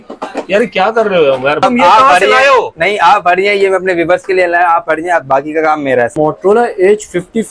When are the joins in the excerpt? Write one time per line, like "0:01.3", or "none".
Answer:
0:01.6
0:06.1